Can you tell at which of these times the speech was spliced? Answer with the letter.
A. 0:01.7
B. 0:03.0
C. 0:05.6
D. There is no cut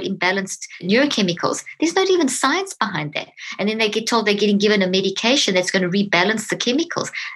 D